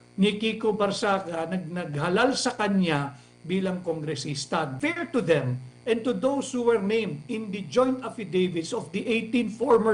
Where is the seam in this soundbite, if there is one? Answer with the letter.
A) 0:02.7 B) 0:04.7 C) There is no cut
B